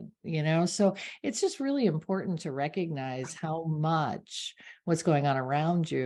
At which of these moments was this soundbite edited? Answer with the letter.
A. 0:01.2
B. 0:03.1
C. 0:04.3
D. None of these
D